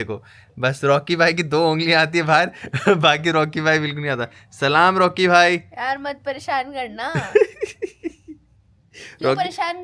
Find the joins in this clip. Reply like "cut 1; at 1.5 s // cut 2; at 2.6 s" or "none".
none

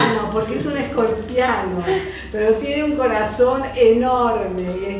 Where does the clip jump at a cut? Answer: none

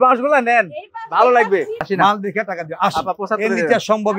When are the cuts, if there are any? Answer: cut 1; at 1.8 s

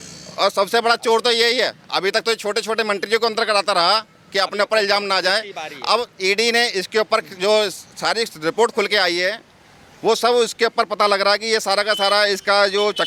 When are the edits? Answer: none

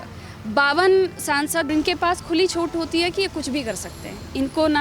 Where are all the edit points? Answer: cut 1; at 1.7 s

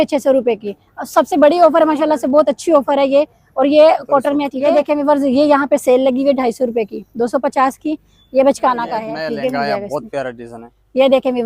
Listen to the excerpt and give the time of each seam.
cut 1; at 4.6 s // cut 2; at 9.1 s

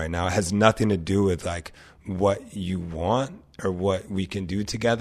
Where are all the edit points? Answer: none

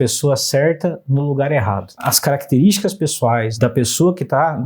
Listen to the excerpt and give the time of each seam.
cut 1; at 2.1 s // cut 2; at 3.5 s

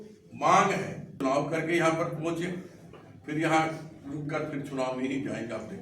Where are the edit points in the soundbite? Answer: cut 1; at 1.2 s

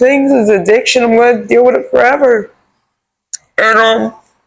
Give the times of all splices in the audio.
none

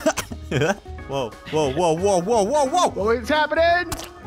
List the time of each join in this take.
cut 1; at 0.9 s

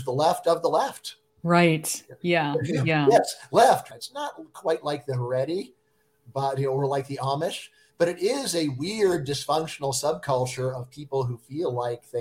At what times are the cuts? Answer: cut 1; at 3.8 s

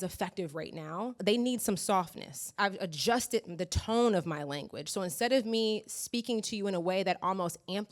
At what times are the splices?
cut 1; at 1.2 s // cut 2; at 2.6 s

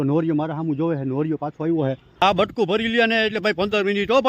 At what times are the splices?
cut 1; at 2.2 s

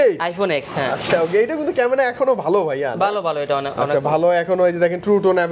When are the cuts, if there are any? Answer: none

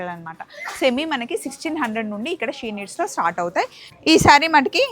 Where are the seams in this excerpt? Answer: cut 1; at 3.8 s

